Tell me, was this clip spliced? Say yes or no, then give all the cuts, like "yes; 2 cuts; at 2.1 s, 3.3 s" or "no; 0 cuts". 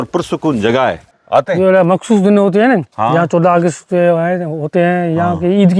yes; 1 cut; at 1.1 s